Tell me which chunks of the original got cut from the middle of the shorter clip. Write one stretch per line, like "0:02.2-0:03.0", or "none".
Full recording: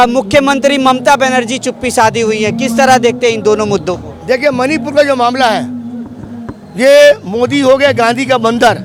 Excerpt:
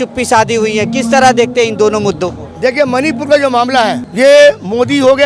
0:05.7-0:06.7